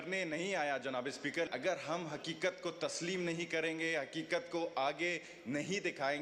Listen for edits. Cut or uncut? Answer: cut